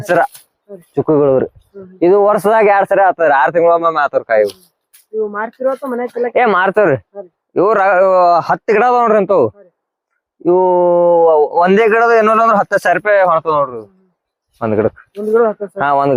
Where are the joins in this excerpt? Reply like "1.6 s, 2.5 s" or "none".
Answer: none